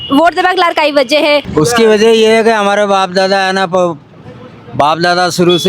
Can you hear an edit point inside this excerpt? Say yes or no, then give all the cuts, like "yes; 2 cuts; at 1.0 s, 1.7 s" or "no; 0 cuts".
yes; 1 cut; at 1.5 s